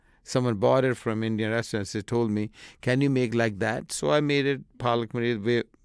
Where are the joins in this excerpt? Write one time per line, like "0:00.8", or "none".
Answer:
0:01.0

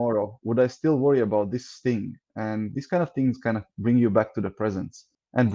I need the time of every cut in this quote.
none

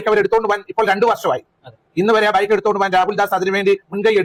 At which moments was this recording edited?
none

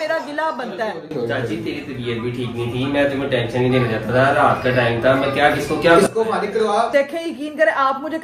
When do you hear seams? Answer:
none

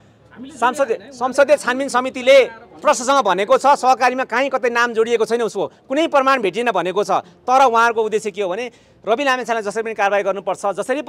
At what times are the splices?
none

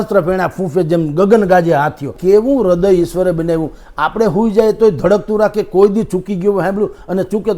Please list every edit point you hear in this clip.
0:02.1

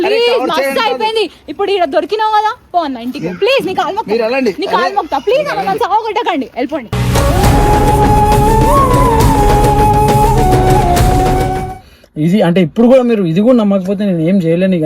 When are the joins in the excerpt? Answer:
0:11.7

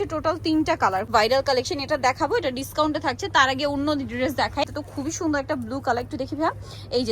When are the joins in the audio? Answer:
0:01.1
0:04.8

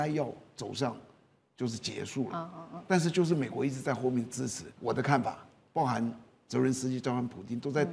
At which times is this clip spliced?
0:04.7

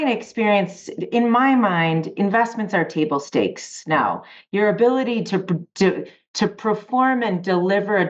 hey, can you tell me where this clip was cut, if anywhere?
none

